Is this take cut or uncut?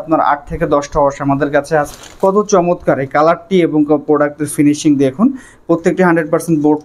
cut